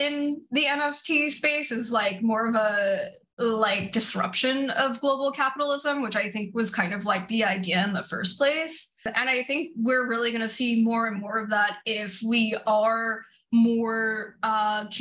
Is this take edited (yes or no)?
yes